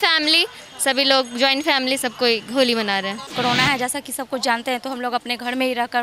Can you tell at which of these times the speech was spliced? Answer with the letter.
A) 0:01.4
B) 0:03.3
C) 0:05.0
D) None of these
B